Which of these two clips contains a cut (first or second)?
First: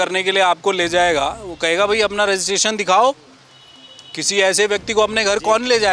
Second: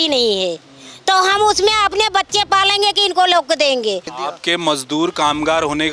second